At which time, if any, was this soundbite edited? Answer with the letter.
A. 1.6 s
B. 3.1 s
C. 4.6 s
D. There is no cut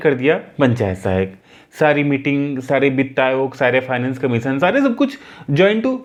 D